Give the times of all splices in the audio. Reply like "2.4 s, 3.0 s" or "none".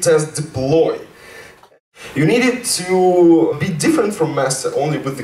1.6 s, 3.5 s